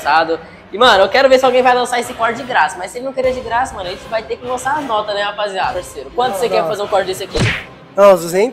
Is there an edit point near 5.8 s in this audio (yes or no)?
yes